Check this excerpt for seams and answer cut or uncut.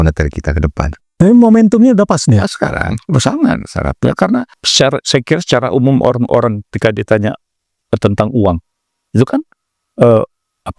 cut